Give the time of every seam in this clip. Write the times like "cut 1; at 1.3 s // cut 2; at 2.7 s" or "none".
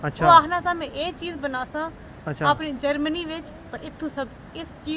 none